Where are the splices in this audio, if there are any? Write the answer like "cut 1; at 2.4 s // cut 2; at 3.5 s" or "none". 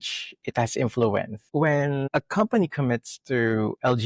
cut 1; at 2.0 s